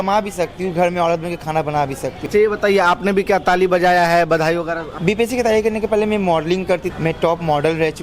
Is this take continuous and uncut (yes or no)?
no